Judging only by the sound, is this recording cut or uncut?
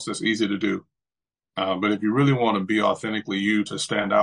uncut